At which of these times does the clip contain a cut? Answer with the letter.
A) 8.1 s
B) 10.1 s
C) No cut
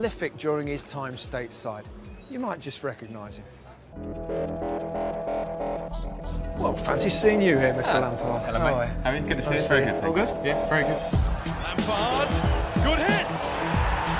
C